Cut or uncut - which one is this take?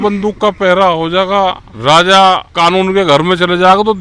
cut